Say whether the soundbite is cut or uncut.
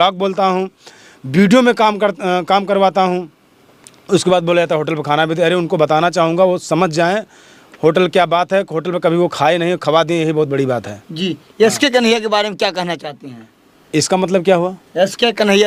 uncut